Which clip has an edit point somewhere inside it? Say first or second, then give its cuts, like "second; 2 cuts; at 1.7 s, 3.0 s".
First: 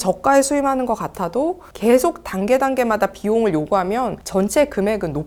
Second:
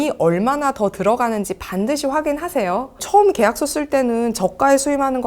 second; 1 cut; at 3.0 s